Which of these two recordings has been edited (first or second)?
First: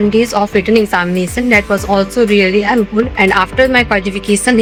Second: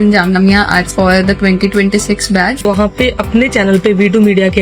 second